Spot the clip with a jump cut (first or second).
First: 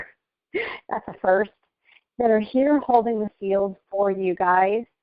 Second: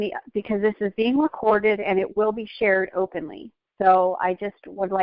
first